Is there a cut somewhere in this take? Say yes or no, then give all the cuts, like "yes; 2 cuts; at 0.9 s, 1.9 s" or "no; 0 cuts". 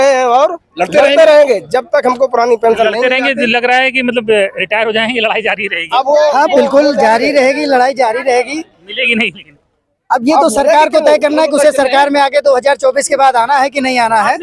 no; 0 cuts